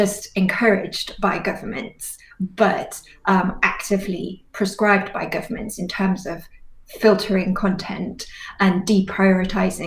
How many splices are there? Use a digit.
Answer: 0